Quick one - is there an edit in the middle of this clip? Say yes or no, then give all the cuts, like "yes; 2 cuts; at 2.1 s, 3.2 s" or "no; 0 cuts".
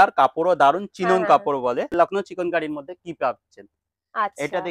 yes; 1 cut; at 1.9 s